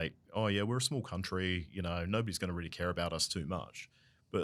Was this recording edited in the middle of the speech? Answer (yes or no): no